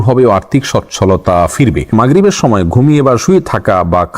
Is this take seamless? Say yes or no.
no